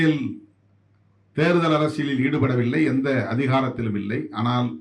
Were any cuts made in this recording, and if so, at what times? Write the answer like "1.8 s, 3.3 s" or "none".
none

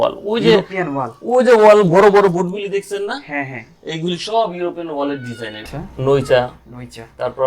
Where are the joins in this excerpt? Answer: 5.5 s

